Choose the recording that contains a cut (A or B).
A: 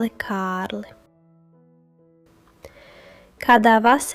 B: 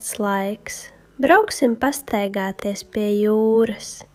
A